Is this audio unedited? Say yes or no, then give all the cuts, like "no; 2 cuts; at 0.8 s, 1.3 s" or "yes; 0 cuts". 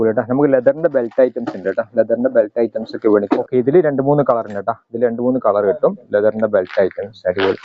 no; 1 cut; at 3.4 s